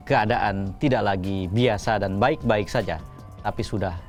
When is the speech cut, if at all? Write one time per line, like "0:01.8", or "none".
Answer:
none